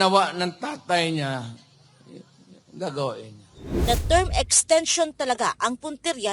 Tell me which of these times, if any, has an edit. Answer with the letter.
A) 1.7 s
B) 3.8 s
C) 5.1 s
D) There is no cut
B